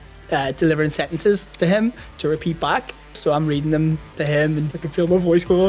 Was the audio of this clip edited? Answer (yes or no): yes